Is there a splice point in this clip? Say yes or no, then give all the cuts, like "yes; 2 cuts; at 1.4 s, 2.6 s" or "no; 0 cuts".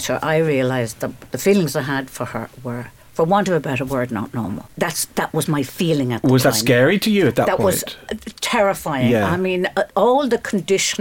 yes; 2 cuts; at 3.0 s, 4.6 s